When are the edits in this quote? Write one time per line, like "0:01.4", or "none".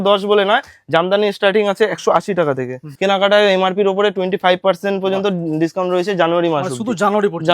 0:02.9